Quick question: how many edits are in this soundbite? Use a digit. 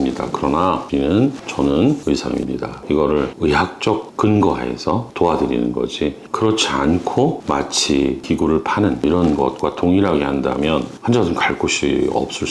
3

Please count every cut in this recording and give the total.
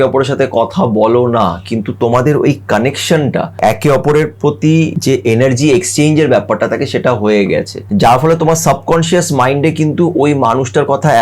3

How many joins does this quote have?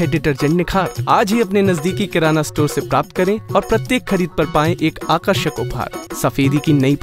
1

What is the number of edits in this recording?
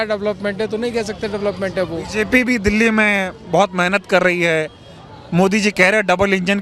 0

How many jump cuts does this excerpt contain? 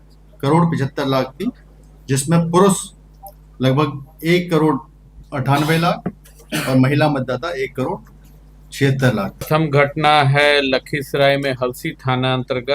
1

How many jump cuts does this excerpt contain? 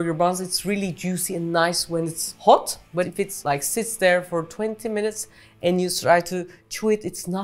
2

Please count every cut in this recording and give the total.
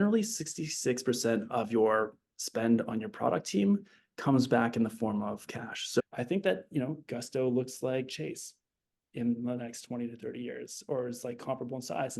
1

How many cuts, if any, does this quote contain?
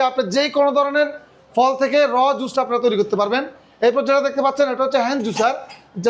0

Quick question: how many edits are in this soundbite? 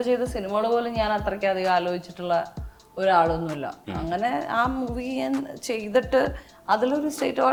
0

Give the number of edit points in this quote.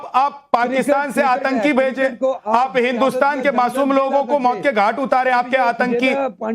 1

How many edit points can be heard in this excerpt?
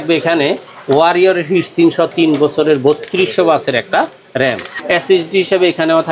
1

